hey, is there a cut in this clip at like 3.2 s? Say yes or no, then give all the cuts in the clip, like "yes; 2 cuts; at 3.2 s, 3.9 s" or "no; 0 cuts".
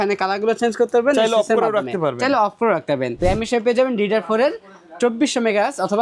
yes; 1 cut; at 3.2 s